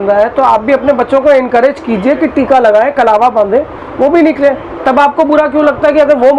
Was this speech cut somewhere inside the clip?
no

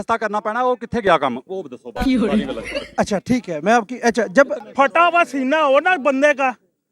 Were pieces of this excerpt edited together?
yes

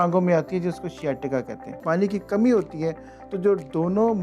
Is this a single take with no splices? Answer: no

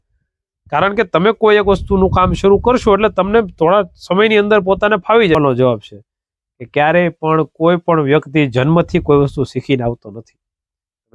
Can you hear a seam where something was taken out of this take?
yes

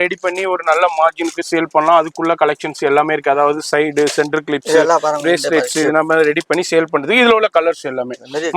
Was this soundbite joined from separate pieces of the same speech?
no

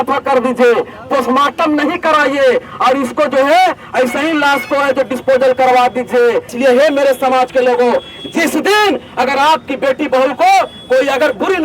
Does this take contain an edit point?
yes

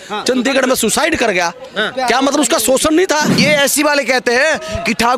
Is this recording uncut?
no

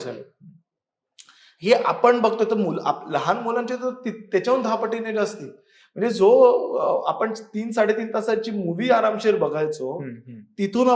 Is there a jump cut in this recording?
no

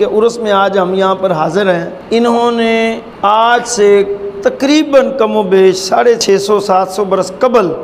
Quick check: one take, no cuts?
no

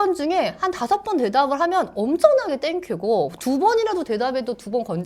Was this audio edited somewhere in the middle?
no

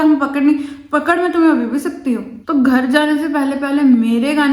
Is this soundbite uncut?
no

